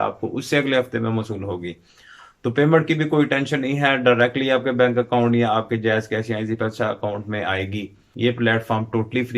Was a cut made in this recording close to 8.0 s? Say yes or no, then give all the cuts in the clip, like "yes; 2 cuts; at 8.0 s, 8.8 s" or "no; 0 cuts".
yes; 1 cut; at 8.0 s